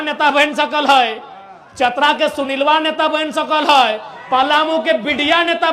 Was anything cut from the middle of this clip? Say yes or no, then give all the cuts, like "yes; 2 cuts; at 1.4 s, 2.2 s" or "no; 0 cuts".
no; 0 cuts